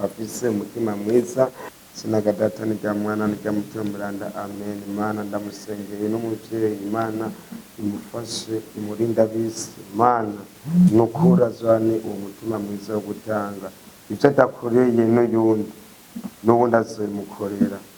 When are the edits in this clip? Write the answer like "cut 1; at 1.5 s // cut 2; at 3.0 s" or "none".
cut 1; at 1.7 s